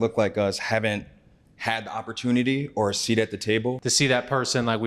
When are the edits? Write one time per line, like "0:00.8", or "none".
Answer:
0:03.8